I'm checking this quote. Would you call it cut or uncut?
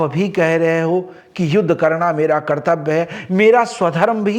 uncut